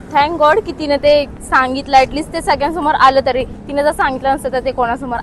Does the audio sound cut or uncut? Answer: uncut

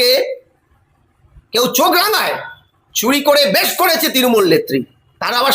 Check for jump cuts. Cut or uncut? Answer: uncut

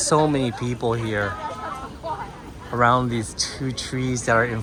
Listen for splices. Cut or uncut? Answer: uncut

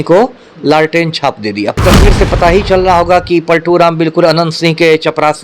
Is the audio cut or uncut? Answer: cut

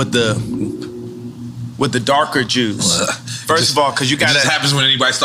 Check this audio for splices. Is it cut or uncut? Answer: uncut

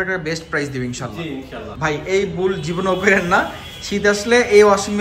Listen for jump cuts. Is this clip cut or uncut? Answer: cut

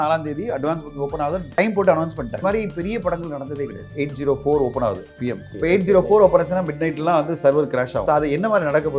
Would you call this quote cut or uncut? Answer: cut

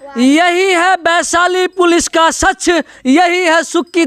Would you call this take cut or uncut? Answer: uncut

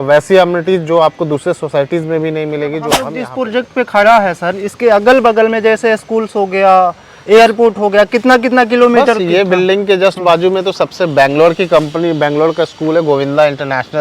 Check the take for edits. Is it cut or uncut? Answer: cut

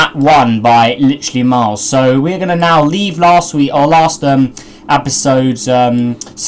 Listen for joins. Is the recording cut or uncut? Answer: cut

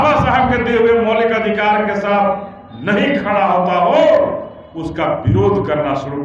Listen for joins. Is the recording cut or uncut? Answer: uncut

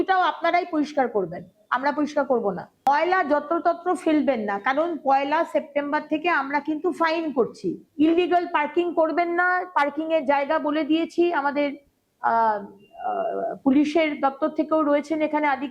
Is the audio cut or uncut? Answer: cut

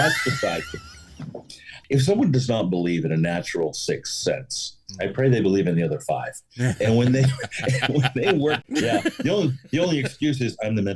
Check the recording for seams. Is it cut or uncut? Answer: cut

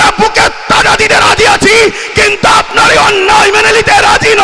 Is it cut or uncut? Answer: uncut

